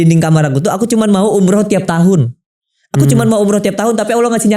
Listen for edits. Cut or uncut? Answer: uncut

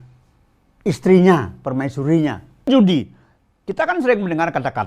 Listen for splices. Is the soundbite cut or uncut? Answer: cut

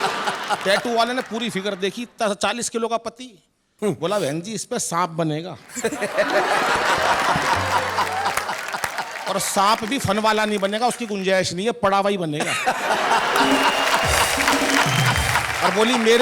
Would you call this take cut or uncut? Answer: uncut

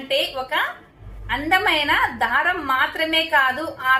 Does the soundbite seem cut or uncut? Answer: uncut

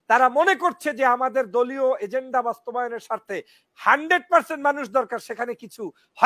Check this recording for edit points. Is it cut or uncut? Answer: uncut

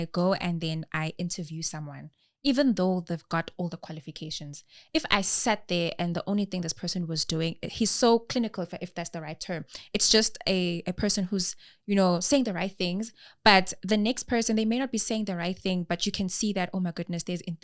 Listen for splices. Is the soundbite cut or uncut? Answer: uncut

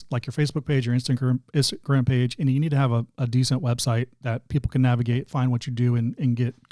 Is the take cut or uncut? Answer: uncut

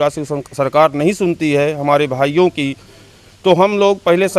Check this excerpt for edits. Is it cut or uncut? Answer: uncut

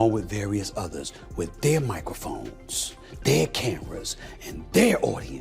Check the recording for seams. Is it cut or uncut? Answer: uncut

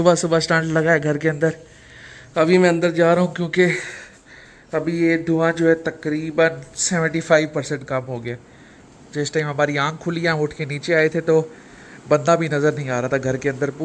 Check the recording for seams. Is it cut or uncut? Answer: uncut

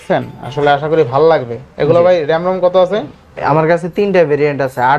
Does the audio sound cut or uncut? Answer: uncut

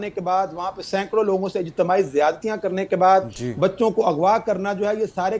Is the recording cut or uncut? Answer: uncut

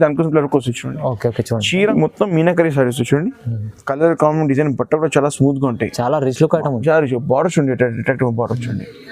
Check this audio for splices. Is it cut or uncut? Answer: cut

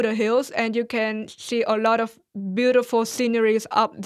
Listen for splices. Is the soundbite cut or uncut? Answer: uncut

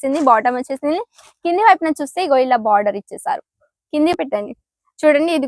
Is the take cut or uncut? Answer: cut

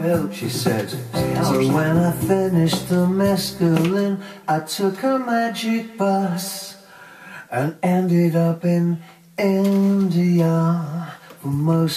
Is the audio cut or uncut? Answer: uncut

